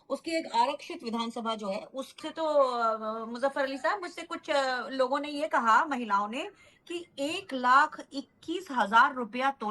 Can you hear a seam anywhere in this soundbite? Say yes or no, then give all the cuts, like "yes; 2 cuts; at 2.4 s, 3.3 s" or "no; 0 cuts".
yes; 1 cut; at 2.2 s